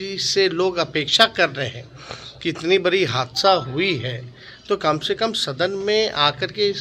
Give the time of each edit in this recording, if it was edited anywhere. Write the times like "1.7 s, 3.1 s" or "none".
none